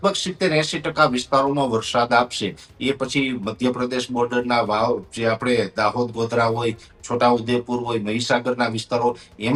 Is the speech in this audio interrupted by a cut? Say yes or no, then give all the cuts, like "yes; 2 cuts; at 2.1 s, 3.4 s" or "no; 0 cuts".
no; 0 cuts